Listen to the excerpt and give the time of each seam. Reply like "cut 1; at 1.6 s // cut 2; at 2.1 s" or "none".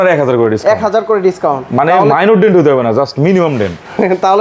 none